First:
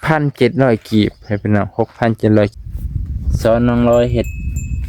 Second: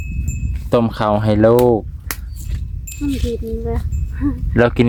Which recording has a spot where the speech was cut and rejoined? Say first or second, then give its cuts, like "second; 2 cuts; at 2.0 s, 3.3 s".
first; 1 cut; at 2.5 s